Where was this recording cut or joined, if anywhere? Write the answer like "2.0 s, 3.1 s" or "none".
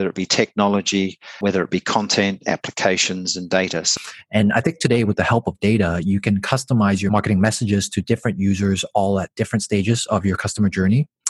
1.4 s, 3.9 s, 7.1 s